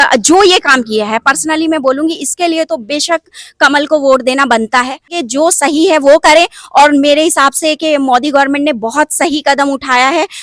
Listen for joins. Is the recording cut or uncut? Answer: cut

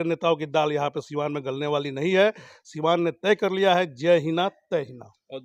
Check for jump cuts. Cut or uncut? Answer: uncut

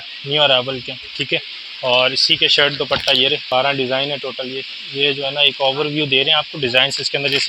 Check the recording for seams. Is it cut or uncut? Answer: cut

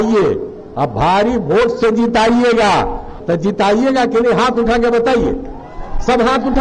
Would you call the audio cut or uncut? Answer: cut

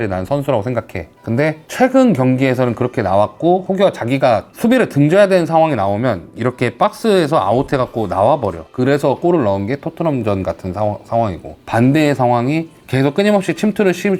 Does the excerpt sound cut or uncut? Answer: uncut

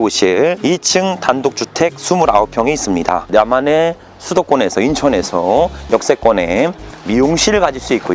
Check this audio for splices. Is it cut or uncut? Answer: cut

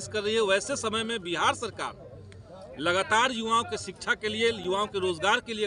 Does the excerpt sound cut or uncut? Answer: uncut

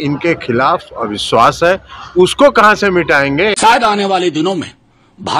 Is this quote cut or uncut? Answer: cut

